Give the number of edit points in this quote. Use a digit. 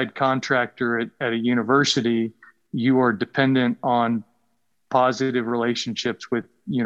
1